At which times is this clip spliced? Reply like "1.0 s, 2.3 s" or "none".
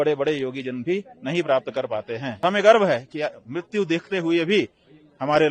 2.4 s